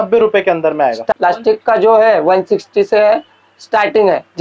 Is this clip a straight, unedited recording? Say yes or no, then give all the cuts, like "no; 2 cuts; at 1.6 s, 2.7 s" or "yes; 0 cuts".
no; 1 cut; at 1.0 s